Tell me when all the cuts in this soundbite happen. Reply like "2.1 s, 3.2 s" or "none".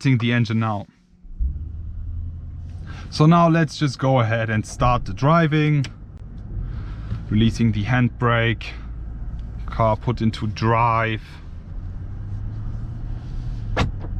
none